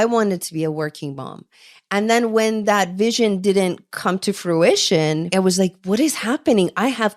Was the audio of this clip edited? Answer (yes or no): yes